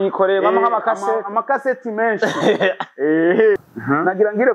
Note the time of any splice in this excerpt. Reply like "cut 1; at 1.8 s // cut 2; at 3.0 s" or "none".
cut 1; at 3.6 s